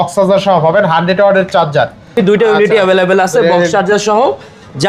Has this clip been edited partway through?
yes; 1 cut; at 2.2 s

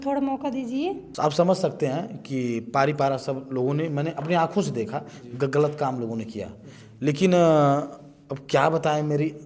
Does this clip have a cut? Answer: yes; 1 cut; at 1.1 s

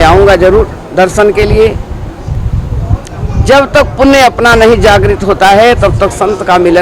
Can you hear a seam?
yes; 1 cut; at 2.4 s

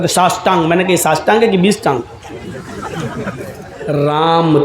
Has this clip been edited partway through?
yes; 1 cut; at 3.7 s

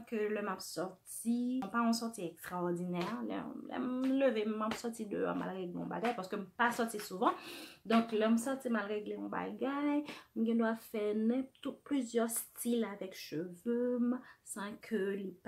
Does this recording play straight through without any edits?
no; 1 cut; at 1.7 s

